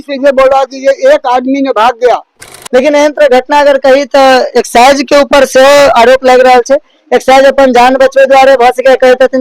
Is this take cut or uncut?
cut